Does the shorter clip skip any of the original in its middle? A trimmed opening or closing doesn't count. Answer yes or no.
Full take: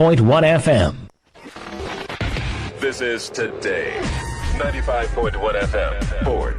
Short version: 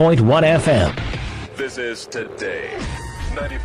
yes